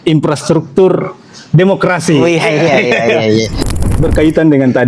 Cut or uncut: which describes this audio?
cut